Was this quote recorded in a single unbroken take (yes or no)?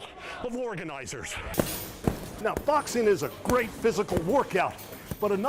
no